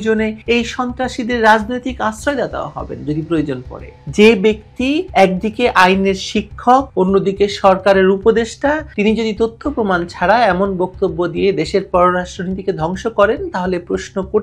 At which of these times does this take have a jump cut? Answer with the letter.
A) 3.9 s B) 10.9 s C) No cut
A